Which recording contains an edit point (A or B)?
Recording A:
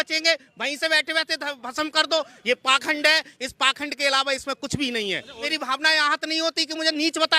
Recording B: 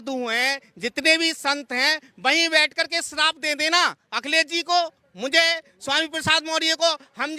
A